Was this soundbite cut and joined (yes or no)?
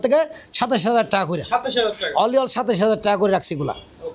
no